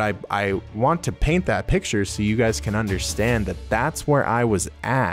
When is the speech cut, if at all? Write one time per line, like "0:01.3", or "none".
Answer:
none